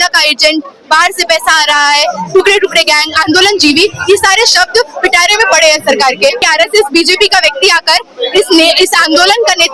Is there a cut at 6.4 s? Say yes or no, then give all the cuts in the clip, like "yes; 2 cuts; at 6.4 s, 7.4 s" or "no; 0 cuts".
yes; 1 cut; at 6.4 s